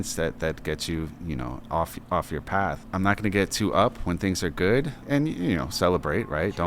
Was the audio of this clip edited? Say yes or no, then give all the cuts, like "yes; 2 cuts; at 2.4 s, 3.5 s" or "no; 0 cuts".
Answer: yes; 2 cuts; at 2.8 s, 5.0 s